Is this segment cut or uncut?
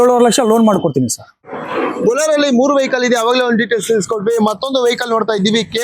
cut